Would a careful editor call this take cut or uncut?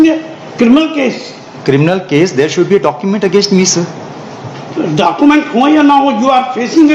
uncut